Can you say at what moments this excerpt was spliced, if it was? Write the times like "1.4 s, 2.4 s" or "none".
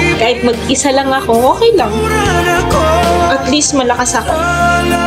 none